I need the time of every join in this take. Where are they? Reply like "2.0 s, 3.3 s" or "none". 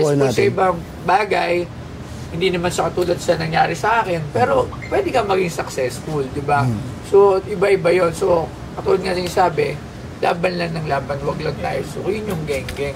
none